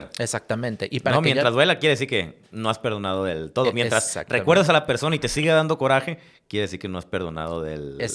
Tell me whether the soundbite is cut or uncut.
uncut